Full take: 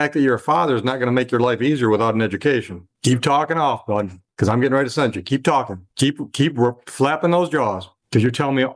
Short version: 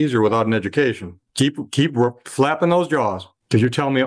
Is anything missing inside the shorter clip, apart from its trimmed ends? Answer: yes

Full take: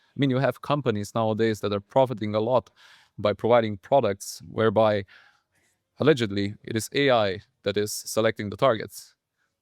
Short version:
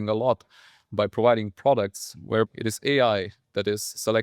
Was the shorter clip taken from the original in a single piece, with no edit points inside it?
no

